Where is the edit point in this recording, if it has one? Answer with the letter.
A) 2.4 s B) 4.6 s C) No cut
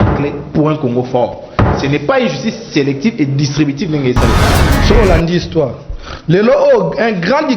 B